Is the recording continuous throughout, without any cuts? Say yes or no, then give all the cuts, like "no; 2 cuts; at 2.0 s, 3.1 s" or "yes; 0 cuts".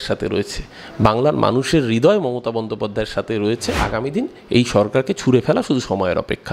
no; 1 cut; at 3.8 s